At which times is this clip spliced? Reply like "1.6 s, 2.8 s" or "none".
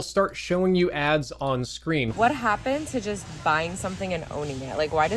2.1 s